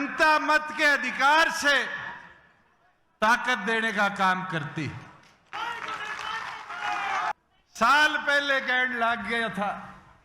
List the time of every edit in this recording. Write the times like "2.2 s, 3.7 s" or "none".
7.3 s

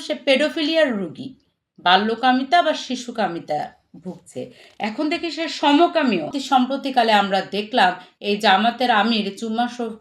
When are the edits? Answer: 6.4 s

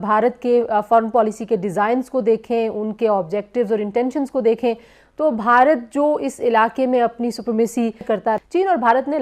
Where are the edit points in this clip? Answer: 8.2 s

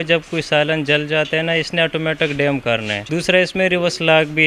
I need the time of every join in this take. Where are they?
3.0 s

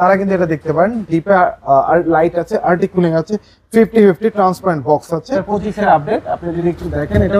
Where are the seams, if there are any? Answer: 5.4 s

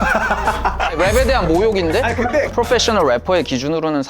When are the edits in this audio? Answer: 2.5 s

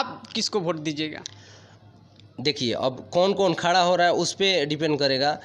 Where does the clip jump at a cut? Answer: none

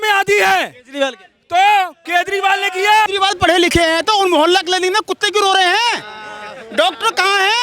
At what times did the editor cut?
3.1 s

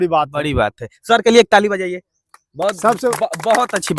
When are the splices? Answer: none

